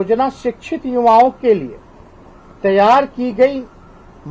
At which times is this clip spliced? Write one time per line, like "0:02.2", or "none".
none